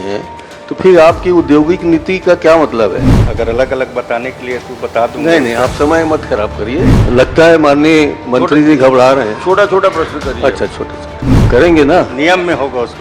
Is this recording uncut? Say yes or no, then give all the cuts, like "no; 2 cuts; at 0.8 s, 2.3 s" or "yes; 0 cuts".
no; 3 cuts; at 3.1 s, 7.0 s, 11.3 s